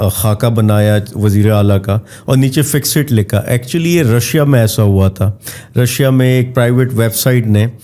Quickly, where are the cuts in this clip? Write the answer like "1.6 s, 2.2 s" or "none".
none